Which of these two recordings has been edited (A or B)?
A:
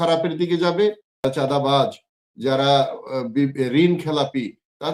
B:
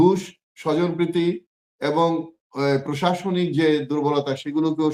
A